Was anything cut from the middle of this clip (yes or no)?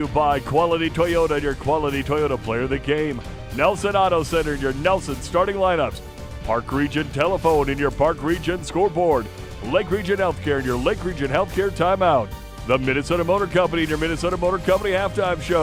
no